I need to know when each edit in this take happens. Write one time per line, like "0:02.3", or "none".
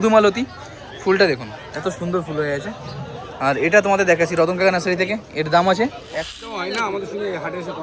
0:06.1

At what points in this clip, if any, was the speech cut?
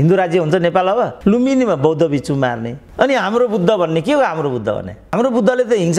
0:01.1

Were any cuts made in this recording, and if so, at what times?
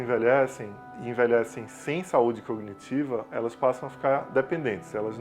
0:00.9

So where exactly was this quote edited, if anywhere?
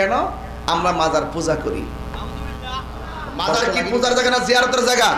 0:03.6

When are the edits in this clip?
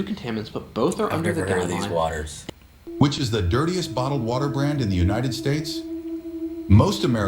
0:02.3

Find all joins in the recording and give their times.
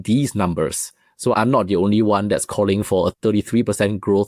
0:01.3
0:03.2

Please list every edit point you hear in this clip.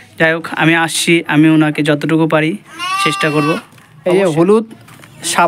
0:04.1

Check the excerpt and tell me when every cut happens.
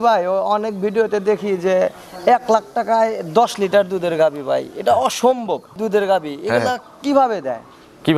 0:05.7

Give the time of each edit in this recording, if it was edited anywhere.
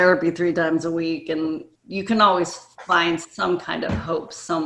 0:01.7

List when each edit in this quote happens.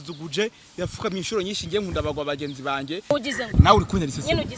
0:03.1

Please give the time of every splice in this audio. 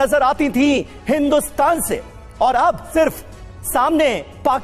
0:02.9

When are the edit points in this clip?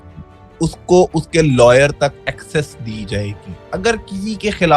0:03.7

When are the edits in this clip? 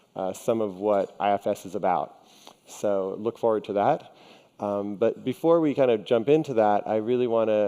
0:02.9

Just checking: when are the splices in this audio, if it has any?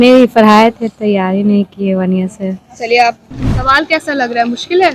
0:03.3

